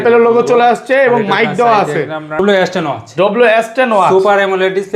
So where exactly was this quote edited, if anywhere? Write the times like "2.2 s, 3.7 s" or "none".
2.4 s